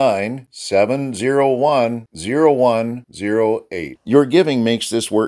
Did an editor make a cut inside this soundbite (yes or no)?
no